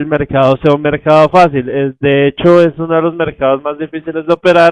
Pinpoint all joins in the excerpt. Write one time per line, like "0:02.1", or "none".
0:03.8